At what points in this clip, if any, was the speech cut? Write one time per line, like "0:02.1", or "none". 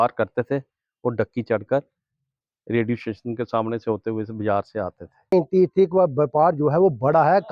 0:05.3